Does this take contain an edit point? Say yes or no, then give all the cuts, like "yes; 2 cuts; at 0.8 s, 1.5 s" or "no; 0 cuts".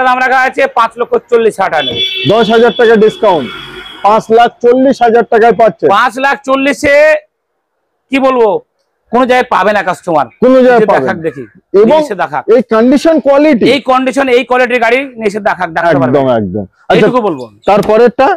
no; 0 cuts